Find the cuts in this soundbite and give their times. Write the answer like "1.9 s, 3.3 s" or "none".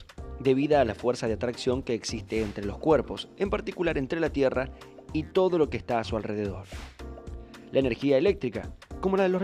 none